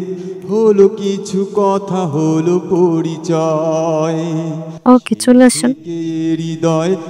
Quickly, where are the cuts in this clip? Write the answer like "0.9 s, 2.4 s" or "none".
4.7 s, 5.9 s